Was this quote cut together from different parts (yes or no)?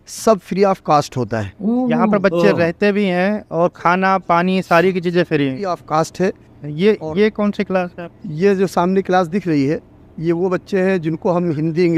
yes